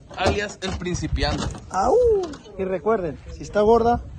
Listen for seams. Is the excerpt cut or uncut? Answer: uncut